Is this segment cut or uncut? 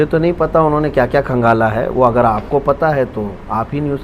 uncut